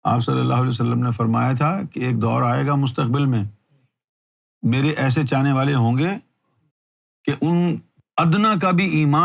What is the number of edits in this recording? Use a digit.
1